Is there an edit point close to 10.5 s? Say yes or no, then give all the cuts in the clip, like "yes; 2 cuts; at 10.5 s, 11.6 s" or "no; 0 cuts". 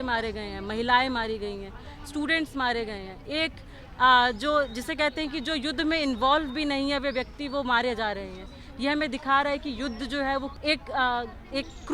yes; 1 cut; at 10.5 s